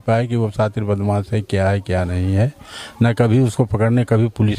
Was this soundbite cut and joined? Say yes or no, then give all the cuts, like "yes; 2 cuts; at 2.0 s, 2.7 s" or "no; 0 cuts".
no; 0 cuts